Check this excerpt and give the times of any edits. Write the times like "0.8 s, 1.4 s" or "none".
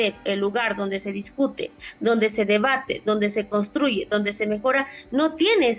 none